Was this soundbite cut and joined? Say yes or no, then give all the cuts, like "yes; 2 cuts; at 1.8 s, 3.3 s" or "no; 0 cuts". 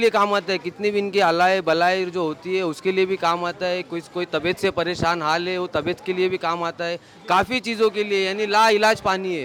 no; 0 cuts